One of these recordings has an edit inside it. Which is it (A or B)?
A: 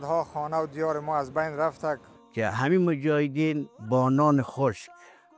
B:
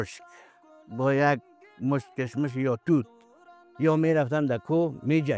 A